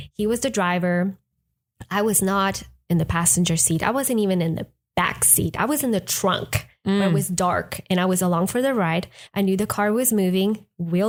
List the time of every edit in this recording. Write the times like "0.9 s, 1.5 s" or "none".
none

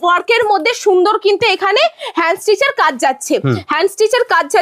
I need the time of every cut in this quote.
none

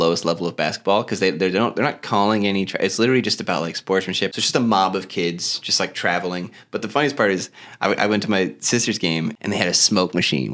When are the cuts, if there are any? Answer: 4.3 s, 9.4 s

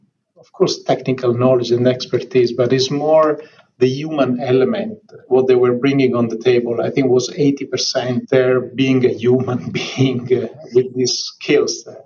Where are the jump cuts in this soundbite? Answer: none

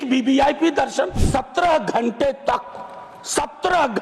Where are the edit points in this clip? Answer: 1.2 s

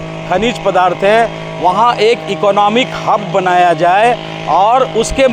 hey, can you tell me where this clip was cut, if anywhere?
none

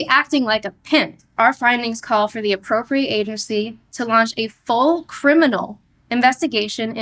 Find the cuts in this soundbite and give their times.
1.3 s

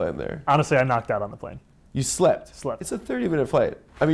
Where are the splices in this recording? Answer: none

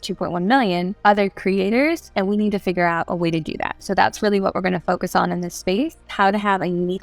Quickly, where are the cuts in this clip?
0.9 s, 2.1 s, 6.1 s

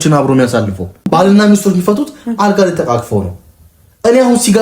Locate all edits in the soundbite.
1.1 s

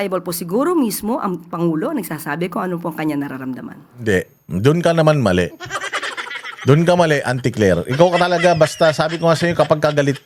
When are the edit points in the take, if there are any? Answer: none

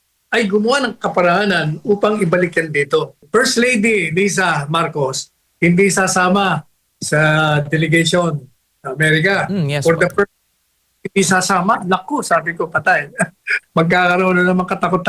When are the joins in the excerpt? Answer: 3.2 s

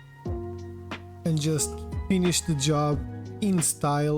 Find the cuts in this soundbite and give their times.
1.1 s

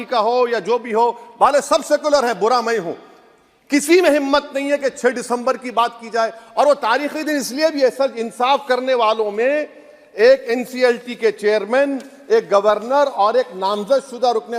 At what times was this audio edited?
none

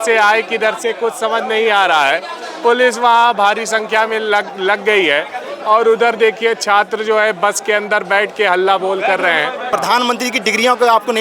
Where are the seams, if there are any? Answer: 9.6 s

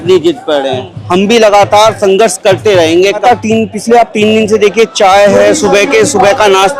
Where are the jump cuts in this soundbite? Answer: 3.2 s

